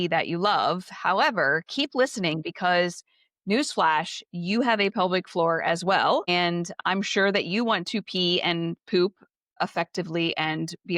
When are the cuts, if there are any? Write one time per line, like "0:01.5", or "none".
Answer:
0:09.6